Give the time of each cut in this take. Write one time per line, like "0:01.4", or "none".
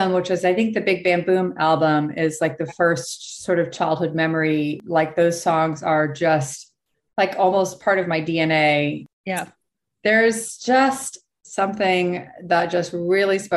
0:04.8
0:09.0